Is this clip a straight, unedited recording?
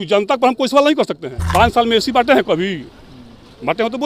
no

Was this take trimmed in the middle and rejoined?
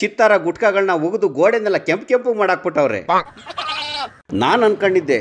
yes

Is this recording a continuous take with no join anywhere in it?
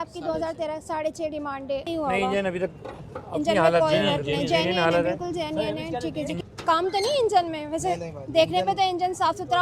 no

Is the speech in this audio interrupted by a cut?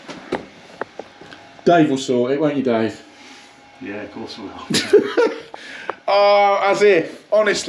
no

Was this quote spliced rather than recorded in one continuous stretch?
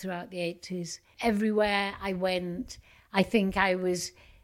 yes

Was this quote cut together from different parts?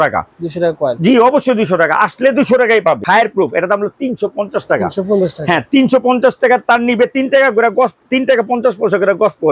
yes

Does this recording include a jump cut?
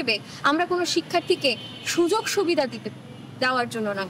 no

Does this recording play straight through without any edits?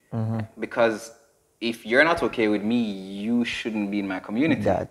yes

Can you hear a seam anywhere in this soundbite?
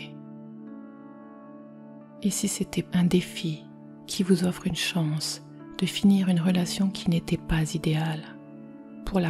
no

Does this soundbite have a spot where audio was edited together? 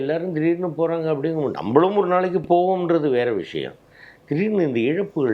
no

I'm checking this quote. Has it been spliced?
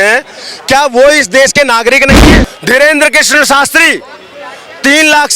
yes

